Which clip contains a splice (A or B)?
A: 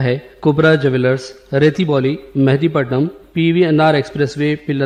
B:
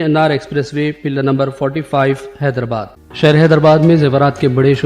B